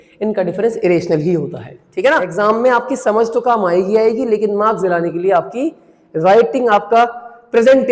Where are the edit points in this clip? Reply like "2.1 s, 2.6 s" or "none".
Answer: 2.3 s